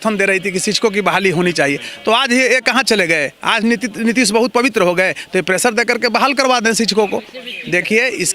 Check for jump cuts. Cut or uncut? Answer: uncut